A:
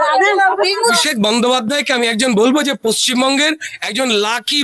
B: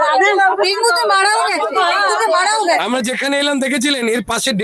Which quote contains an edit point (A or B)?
A